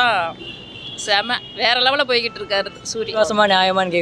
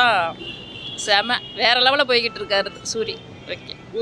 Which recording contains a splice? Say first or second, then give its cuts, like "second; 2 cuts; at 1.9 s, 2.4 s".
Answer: first; 1 cut; at 3.1 s